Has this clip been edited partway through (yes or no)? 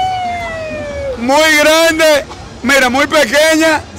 no